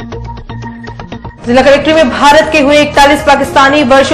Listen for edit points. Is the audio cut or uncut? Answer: uncut